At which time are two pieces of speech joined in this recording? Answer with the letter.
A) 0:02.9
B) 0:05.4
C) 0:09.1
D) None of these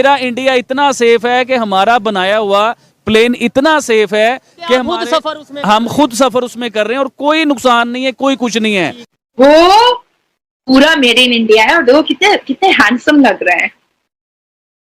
C